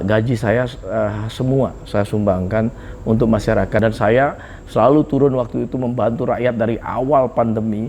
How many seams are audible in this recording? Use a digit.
1